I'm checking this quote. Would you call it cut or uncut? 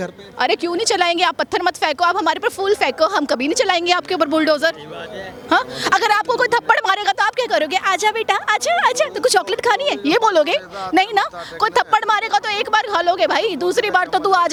uncut